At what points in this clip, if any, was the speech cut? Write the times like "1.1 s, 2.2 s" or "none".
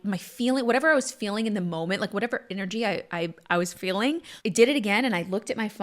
4.3 s